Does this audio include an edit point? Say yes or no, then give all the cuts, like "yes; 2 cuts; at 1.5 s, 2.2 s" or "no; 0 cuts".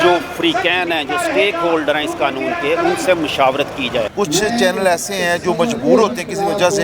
yes; 1 cut; at 4.1 s